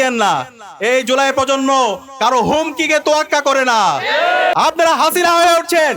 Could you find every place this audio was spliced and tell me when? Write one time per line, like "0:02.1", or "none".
0:04.5